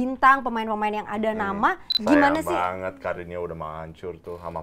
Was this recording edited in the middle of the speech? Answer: yes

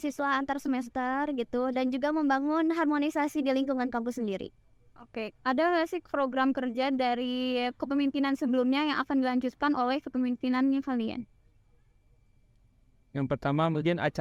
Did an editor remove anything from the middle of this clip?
no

